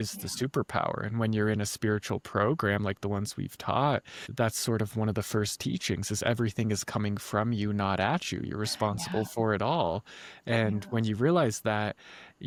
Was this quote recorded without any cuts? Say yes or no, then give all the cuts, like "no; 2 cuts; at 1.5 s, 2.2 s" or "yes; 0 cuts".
yes; 0 cuts